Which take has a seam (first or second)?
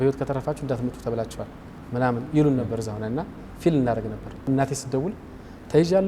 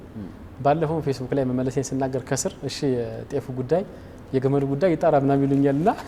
first